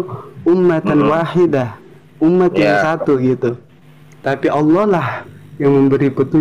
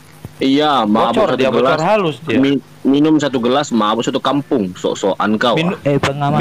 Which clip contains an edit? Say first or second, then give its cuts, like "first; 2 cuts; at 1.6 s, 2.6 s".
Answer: first; 1 cut; at 4.2 s